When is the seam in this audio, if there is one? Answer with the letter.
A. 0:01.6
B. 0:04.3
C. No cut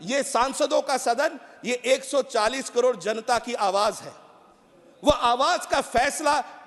C